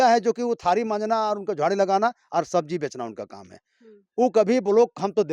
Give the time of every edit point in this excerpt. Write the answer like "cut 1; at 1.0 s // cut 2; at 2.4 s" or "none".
none